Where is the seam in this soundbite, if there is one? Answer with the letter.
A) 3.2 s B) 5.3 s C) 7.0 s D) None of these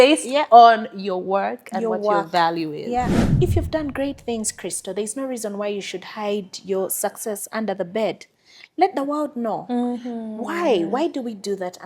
A